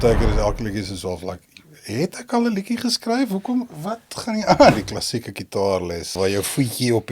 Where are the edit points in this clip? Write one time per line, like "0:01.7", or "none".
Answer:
0:04.7
0:06.2